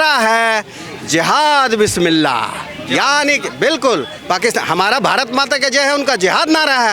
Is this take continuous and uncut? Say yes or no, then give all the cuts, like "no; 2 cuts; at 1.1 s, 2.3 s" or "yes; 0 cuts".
yes; 0 cuts